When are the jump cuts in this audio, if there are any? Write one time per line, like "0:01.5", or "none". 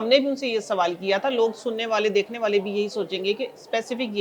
none